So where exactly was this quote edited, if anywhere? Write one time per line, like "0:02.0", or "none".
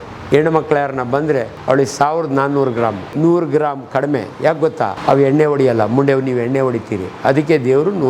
0:01.5
0:03.1
0:05.0